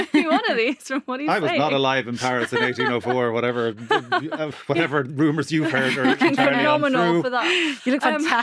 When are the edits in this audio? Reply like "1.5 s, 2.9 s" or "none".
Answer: none